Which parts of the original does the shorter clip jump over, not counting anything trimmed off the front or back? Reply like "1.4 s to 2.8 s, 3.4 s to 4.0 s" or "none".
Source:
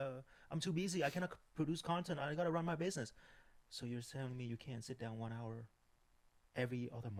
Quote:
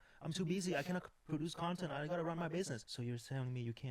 3.1 s to 3.7 s